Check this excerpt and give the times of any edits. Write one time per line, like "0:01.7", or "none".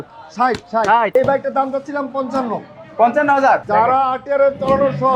0:01.1
0:03.6